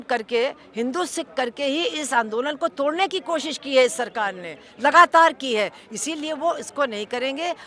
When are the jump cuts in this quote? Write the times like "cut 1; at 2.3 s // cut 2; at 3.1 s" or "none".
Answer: none